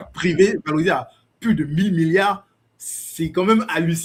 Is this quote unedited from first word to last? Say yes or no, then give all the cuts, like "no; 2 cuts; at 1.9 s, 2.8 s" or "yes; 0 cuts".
yes; 0 cuts